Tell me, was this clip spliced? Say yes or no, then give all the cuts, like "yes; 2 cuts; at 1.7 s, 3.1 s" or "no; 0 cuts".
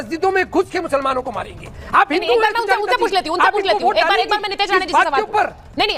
no; 0 cuts